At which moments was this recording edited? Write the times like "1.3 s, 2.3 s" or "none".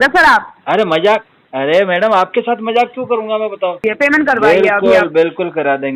3.8 s